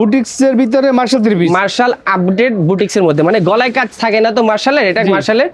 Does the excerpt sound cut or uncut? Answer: uncut